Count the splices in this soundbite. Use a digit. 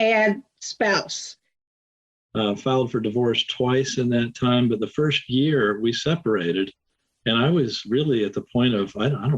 1